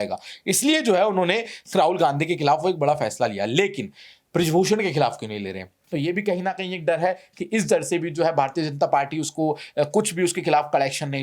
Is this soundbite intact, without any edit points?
no; 1 cut; at 5.8 s

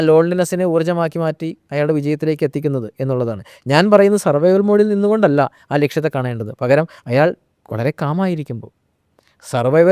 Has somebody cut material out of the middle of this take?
no; 0 cuts

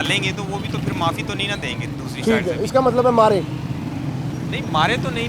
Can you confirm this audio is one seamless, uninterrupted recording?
yes; 0 cuts

